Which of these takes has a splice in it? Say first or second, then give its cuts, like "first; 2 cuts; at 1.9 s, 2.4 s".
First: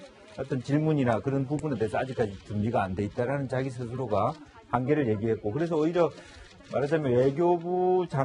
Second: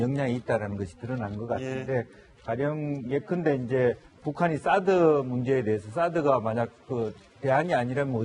second; 1 cut; at 4.2 s